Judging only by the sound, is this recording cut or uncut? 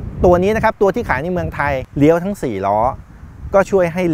cut